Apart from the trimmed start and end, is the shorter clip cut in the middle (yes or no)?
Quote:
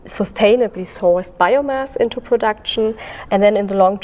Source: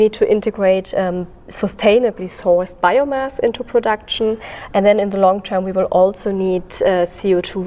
no